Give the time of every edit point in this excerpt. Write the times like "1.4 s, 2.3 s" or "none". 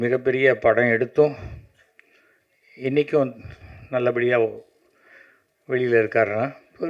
none